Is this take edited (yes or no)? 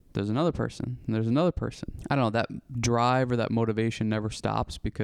yes